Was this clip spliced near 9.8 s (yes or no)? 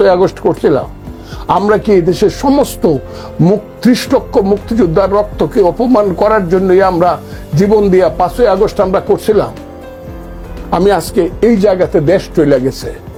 no